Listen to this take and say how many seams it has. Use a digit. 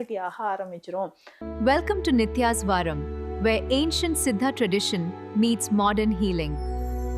1